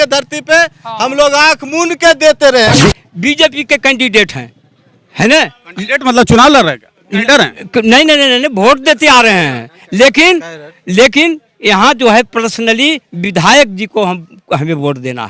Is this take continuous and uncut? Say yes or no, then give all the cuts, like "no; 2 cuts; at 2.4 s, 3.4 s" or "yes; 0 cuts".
no; 1 cut; at 2.8 s